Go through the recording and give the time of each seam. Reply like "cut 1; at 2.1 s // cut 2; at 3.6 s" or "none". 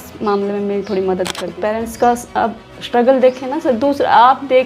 cut 1; at 1.4 s